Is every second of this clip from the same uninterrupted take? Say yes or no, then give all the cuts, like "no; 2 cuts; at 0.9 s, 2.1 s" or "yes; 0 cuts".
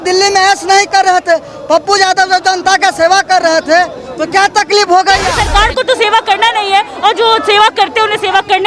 no; 1 cut; at 5.4 s